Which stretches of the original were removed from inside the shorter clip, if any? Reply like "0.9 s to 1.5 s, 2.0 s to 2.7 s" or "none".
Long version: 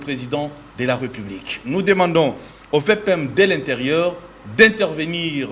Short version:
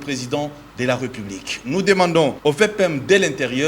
2.4 s to 2.6 s